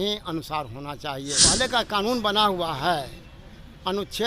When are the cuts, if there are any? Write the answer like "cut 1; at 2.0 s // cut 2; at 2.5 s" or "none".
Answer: cut 1; at 1.4 s